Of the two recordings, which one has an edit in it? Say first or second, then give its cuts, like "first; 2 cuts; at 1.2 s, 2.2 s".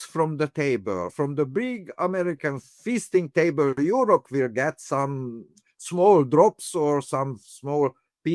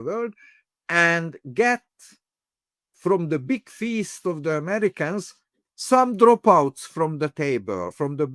first; 1 cut; at 2.7 s